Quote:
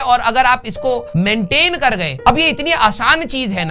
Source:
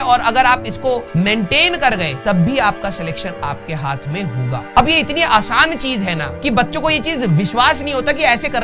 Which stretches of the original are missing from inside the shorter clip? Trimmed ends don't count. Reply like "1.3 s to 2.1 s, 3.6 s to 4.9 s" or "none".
2.1 s to 4.6 s